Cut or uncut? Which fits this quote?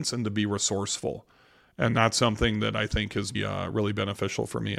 cut